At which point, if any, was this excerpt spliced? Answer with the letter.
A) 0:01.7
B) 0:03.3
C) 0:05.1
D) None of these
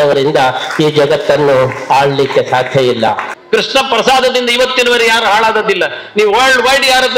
B